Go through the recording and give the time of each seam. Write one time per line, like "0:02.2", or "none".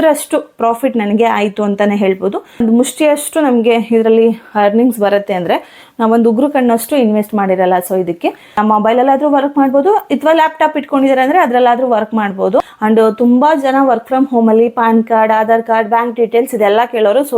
0:02.6
0:08.6
0:12.7